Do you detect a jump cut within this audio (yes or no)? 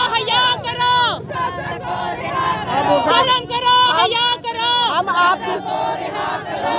no